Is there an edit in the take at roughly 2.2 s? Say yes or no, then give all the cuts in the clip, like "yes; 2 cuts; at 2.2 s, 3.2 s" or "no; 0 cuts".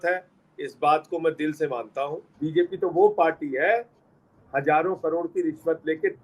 yes; 1 cut; at 2.2 s